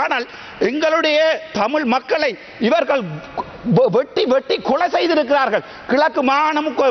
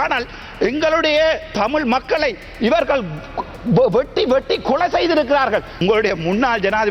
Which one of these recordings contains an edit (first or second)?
second